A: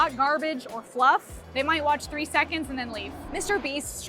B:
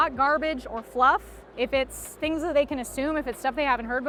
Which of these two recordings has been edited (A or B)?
A